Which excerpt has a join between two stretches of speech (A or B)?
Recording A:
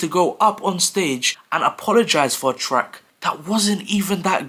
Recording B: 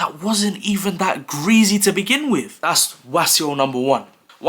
B